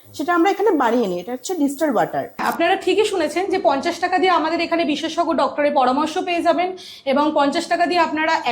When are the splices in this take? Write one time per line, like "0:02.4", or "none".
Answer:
0:02.3